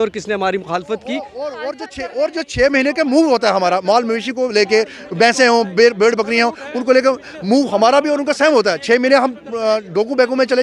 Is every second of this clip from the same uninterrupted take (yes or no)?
no